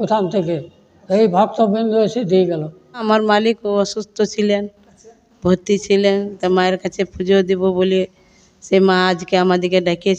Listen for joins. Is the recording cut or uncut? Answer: cut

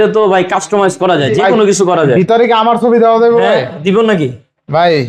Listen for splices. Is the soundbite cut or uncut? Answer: uncut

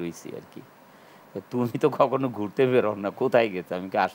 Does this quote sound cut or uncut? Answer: uncut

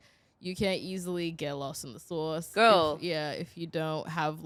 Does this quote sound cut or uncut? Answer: uncut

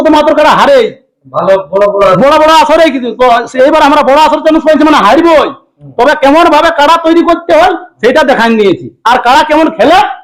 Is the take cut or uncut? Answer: uncut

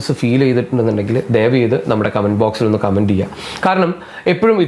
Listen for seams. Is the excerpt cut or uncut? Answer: uncut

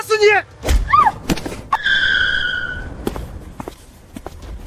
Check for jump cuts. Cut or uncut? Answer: cut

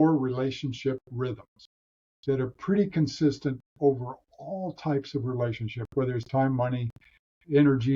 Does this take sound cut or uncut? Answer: uncut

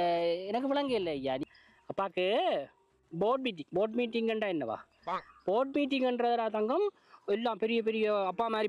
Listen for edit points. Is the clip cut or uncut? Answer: cut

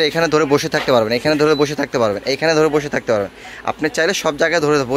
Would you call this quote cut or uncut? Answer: uncut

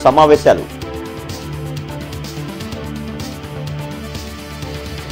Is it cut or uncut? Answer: uncut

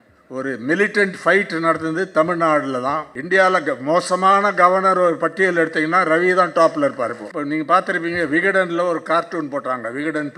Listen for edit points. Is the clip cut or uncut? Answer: cut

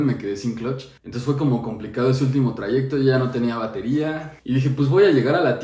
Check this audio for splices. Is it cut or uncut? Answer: uncut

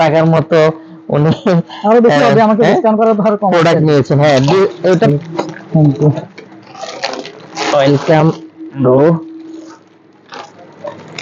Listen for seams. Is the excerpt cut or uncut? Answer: cut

